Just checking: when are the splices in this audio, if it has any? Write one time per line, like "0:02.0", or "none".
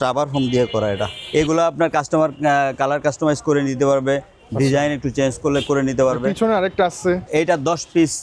0:01.2
0:07.2